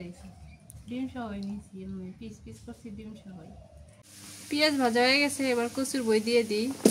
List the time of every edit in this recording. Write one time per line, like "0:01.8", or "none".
0:04.1